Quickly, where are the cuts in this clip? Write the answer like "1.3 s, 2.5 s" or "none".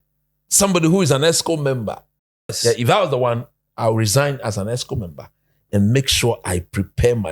2.6 s

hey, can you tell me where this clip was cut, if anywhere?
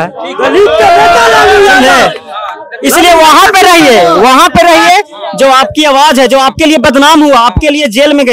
none

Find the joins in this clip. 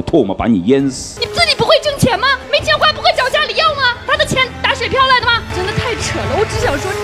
1.1 s, 5.5 s

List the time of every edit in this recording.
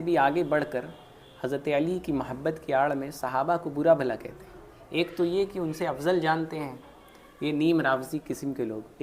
none

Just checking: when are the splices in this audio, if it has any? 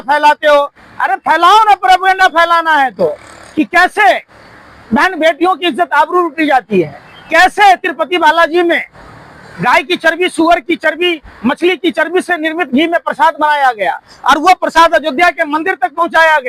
none

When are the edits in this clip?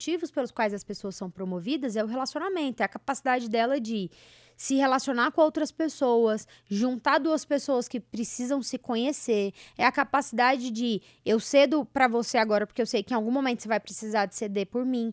none

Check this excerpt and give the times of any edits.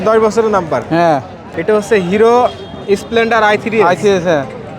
1.5 s

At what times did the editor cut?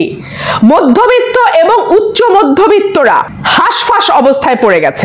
3.4 s

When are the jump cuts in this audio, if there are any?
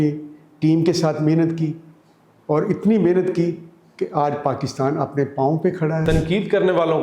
6.0 s

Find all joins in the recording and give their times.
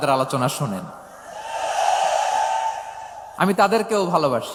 none

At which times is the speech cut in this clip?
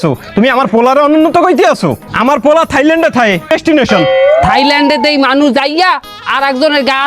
3.5 s

